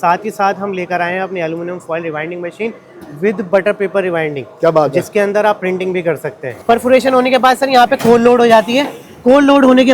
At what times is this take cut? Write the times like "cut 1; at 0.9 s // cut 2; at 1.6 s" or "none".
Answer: cut 1; at 6.5 s